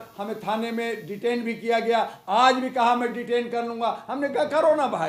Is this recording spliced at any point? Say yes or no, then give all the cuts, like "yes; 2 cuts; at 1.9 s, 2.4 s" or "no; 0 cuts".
no; 0 cuts